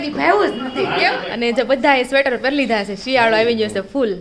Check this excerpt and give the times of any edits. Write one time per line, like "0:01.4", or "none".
0:01.3